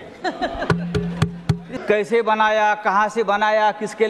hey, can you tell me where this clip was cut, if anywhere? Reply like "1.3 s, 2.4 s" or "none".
1.6 s